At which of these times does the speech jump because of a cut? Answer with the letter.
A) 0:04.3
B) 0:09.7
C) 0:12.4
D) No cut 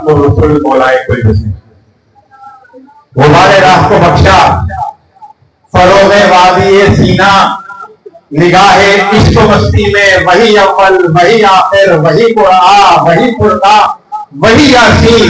D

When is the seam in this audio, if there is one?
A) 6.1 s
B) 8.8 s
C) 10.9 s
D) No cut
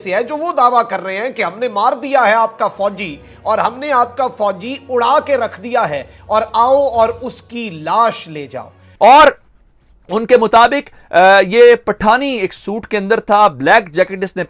B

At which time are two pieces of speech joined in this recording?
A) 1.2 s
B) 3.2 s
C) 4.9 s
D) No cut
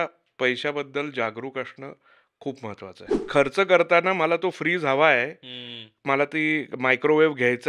B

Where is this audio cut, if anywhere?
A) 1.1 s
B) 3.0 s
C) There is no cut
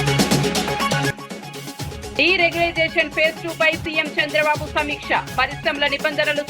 A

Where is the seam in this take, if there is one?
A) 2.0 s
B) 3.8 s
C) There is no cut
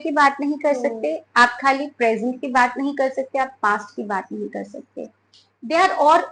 C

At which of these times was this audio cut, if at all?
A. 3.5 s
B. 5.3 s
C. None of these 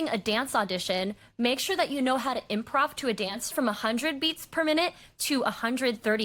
A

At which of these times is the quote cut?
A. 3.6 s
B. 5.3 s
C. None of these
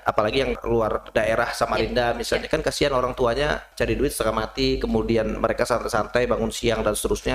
C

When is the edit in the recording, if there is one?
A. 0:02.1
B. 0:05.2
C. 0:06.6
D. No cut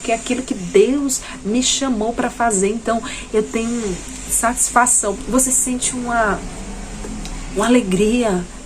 B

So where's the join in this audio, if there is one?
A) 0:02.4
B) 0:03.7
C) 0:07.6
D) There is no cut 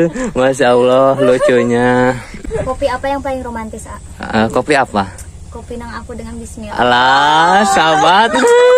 A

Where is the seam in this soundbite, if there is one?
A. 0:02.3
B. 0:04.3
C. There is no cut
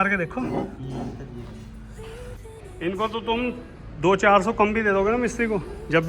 A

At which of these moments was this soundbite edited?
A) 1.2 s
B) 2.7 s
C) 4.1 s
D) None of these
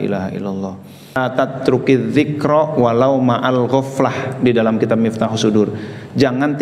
A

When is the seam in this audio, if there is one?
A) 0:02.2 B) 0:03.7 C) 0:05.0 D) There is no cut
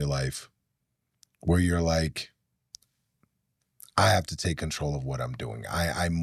D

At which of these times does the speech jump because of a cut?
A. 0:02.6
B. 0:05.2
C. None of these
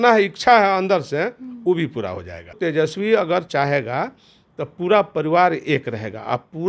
A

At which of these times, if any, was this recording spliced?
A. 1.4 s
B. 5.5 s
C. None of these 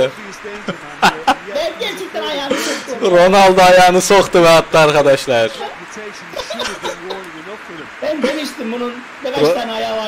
C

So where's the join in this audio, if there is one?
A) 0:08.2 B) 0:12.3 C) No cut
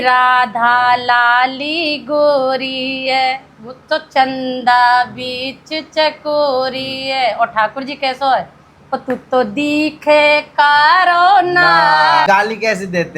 B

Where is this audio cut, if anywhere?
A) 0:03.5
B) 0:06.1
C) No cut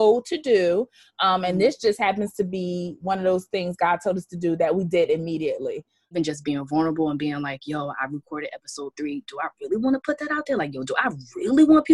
B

